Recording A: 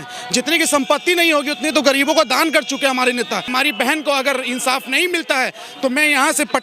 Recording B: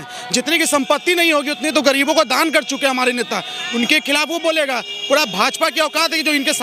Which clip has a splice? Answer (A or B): A